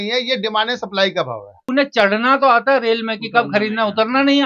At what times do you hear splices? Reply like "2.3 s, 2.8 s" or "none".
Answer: 1.7 s